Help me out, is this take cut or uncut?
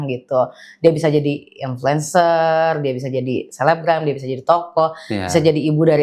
uncut